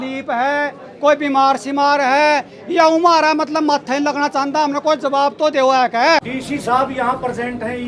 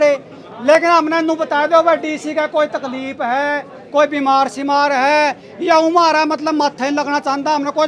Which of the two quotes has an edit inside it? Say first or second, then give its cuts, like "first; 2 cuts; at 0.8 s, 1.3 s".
first; 1 cut; at 6.2 s